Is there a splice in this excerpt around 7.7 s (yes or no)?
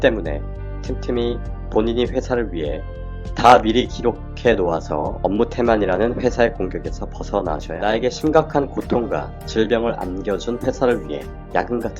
yes